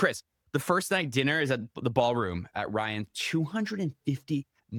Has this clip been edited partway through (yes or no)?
no